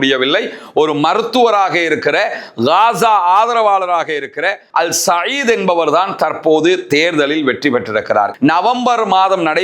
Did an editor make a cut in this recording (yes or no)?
yes